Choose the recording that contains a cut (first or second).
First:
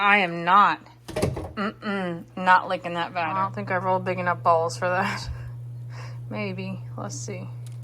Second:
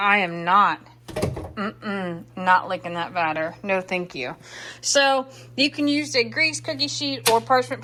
first